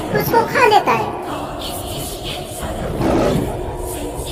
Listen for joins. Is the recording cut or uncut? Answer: uncut